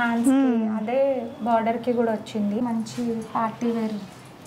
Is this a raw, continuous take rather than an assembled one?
no; 1 cut; at 2.6 s

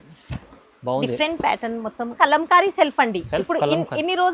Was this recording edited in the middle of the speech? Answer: yes; 1 cut; at 2.2 s

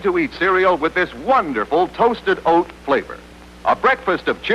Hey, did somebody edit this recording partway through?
no; 0 cuts

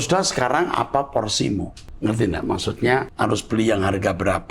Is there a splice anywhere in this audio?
yes; 2 cuts; at 1.8 s, 3.1 s

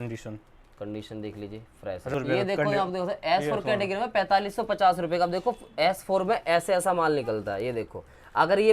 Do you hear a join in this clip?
yes; 1 cut; at 2.1 s

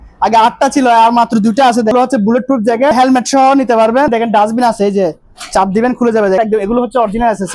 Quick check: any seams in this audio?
yes; 4 cuts; at 1.9 s, 2.9 s, 4.1 s, 6.4 s

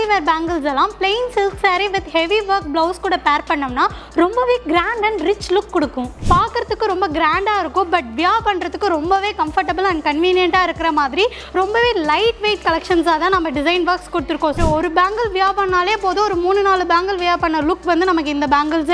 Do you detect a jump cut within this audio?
yes; 2 cuts; at 6.1 s, 14.6 s

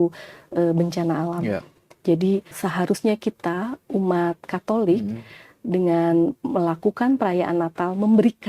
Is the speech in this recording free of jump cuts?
no; 1 cut; at 2.5 s

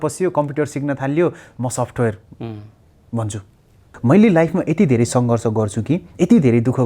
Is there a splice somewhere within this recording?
yes; 1 cut; at 3.9 s

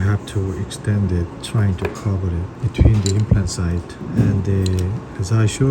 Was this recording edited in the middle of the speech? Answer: yes; 3 cuts; at 1.4 s, 2.5 s, 3.9 s

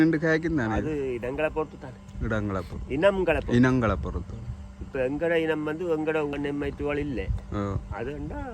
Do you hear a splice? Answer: yes; 1 cut; at 6.3 s

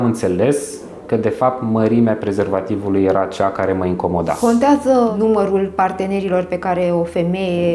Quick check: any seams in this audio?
yes; 2 cuts; at 4.4 s, 5.1 s

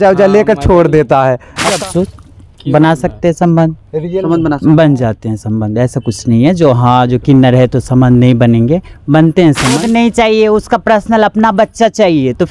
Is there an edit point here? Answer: yes; 2 cuts; at 1.8 s, 9.8 s

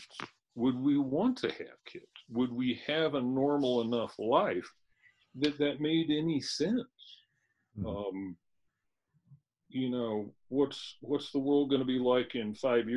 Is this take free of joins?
yes; 0 cuts

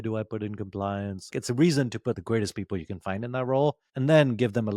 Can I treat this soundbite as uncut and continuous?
no; 1 cut; at 1.4 s

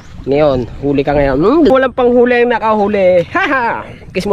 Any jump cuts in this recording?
yes; 1 cut; at 1.7 s

